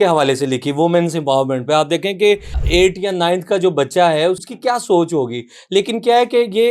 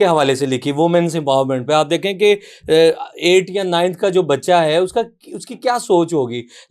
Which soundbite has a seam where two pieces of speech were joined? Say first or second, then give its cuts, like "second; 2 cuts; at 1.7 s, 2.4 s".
first; 2 cuts; at 2.5 s, 4.4 s